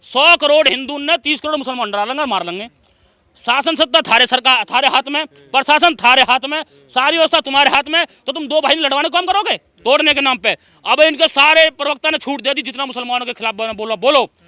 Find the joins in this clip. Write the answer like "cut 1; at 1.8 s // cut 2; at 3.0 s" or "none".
cut 1; at 9.7 s